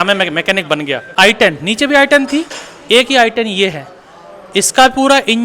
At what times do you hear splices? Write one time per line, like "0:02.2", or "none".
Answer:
0:01.1